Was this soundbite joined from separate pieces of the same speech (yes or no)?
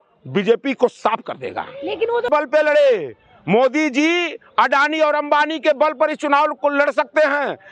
yes